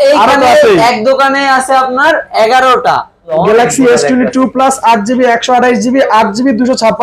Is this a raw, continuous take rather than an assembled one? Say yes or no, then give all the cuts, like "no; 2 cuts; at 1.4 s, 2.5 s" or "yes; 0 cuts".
no; 1 cut; at 3.3 s